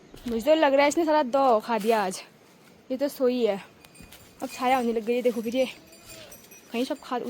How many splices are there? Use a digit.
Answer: 0